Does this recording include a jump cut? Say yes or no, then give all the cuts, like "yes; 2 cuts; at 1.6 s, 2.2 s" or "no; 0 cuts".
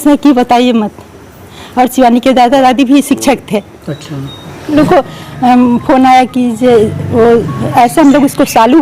yes; 1 cut; at 4.7 s